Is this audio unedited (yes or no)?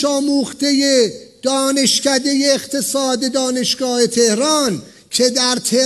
yes